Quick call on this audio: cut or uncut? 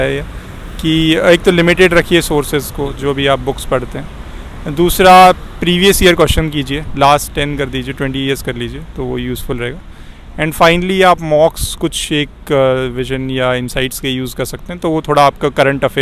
uncut